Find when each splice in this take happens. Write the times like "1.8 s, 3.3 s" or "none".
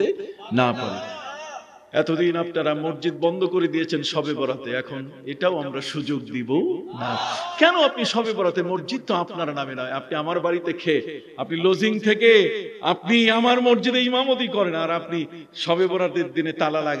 none